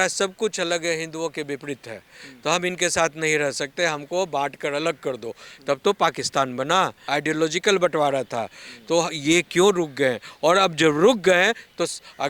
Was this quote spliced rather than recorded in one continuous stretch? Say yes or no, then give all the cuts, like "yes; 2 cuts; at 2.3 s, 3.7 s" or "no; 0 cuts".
yes; 1 cut; at 7.0 s